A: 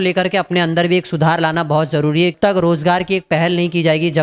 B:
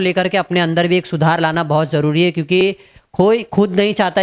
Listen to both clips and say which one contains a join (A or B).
A